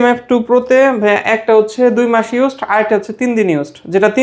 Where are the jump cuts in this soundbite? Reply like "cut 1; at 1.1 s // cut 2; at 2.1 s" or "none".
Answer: none